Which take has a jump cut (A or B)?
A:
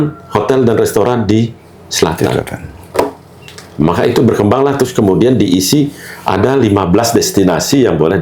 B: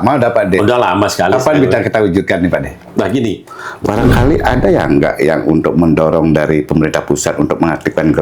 B